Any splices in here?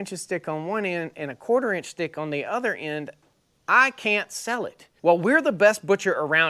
yes; 1 cut; at 4.8 s

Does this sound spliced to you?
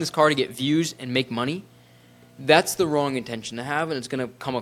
no; 0 cuts

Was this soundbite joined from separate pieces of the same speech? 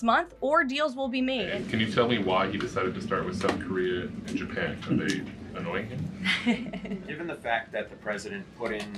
yes; 2 cuts; at 1.5 s, 7.1 s

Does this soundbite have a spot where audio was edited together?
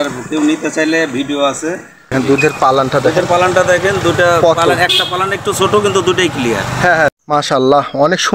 yes; 2 cuts; at 2.1 s, 7.1 s

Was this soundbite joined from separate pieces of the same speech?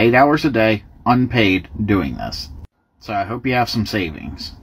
yes; 1 cut; at 2.6 s

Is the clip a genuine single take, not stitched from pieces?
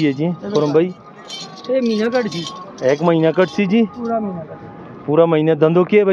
yes; 0 cuts

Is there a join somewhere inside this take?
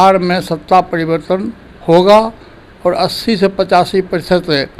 no; 0 cuts

